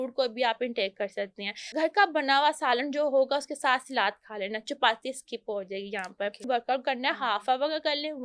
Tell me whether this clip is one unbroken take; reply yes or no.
no